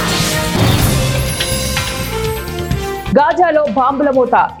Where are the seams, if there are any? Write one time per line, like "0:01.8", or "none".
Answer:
none